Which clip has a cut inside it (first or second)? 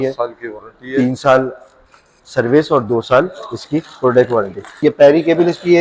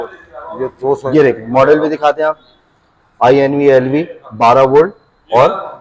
first